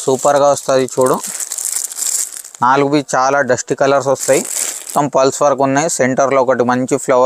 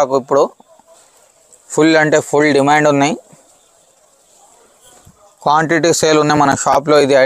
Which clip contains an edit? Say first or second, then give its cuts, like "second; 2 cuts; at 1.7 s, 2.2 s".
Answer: first; 1 cut; at 4.9 s